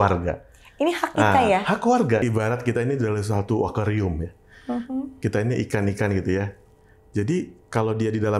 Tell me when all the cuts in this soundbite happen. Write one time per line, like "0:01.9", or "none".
0:02.2